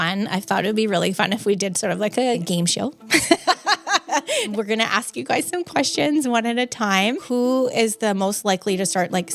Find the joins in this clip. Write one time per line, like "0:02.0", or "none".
0:02.4
0:04.6
0:07.2